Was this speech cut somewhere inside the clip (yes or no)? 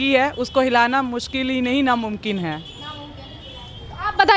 no